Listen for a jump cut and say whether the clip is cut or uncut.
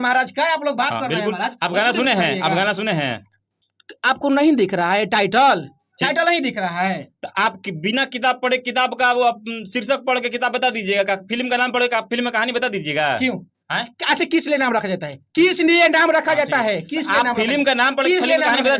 uncut